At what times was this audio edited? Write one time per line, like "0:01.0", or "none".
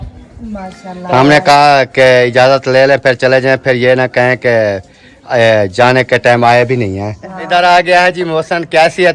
0:07.4